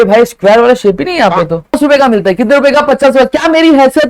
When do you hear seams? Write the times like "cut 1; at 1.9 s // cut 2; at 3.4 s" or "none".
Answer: cut 1; at 1.8 s